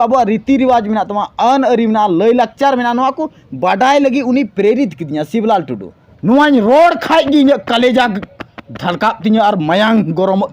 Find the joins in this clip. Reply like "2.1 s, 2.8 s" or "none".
6.1 s